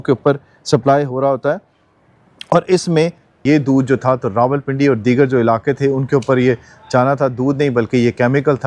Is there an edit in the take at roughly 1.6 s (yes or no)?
no